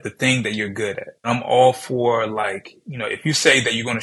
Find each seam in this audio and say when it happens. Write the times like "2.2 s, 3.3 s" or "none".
1.3 s